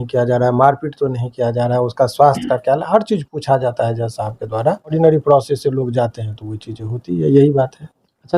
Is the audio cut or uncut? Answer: cut